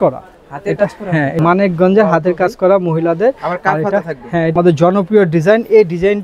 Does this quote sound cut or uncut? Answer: cut